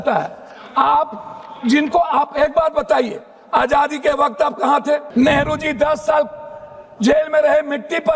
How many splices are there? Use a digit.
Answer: 1